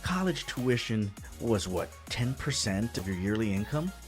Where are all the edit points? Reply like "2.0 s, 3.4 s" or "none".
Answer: 1.3 s, 3.0 s